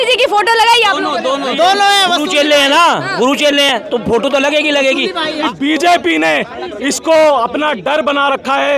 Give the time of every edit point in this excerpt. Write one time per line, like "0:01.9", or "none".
0:05.4